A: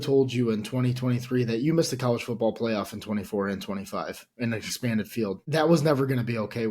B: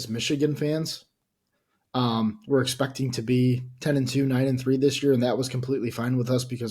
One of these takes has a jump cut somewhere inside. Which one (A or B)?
A